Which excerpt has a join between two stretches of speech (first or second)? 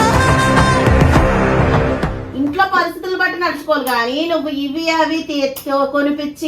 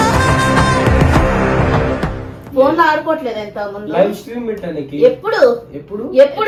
first